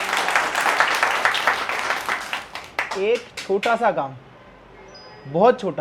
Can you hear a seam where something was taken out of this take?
no; 0 cuts

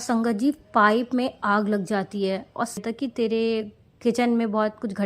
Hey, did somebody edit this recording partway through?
yes; 1 cut; at 2.8 s

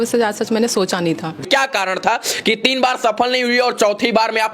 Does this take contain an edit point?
yes; 1 cut; at 1.4 s

